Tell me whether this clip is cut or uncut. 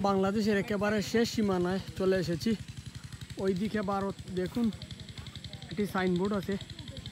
uncut